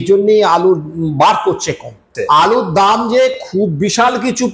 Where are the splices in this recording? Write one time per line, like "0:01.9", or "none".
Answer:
0:02.1

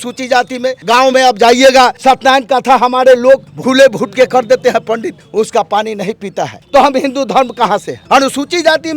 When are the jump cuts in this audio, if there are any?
0:00.8
0:02.0
0:03.5
0:05.2
0:06.6
0:07.9

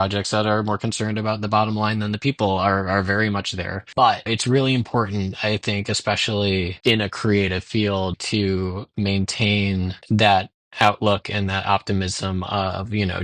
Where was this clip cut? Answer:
none

